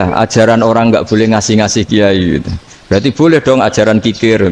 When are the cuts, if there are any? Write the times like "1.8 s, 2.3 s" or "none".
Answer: none